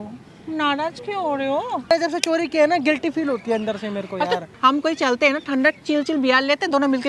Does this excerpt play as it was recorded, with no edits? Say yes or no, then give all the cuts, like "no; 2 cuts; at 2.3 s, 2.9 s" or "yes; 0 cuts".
no; 2 cuts; at 1.9 s, 4.5 s